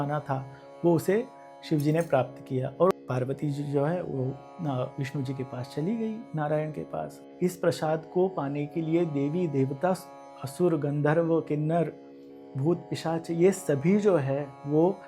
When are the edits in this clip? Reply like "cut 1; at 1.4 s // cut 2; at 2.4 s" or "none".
cut 1; at 2.9 s // cut 2; at 7.1 s